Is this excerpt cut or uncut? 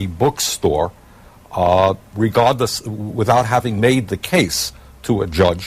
cut